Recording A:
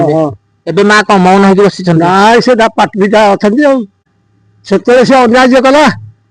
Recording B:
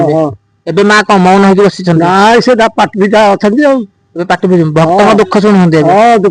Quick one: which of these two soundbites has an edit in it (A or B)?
A